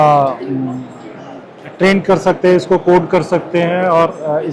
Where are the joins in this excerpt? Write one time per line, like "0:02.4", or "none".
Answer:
none